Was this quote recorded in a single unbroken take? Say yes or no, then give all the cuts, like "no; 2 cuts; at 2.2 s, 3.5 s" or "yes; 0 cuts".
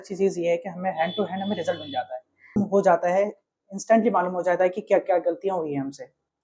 no; 1 cut; at 2.6 s